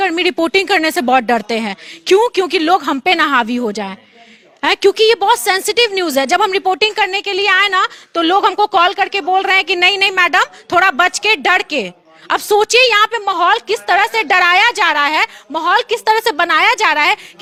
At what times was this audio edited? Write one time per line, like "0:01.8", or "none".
none